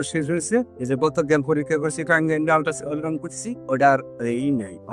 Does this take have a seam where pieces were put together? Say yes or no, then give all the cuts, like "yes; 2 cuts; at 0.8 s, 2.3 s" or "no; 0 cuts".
no; 0 cuts